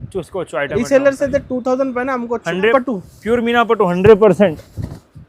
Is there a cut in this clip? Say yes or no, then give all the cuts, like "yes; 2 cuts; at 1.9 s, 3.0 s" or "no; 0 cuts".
yes; 1 cut; at 2.7 s